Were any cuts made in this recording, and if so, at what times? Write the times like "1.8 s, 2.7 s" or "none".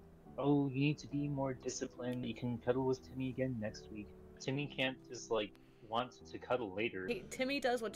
2.3 s, 4.4 s, 7.0 s